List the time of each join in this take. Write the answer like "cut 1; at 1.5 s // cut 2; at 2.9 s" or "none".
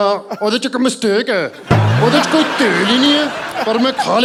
none